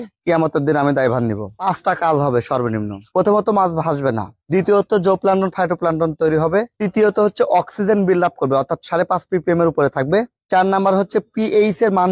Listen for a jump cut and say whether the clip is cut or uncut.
uncut